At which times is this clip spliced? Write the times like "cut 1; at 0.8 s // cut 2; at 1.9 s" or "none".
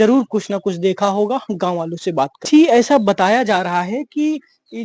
cut 1; at 2.5 s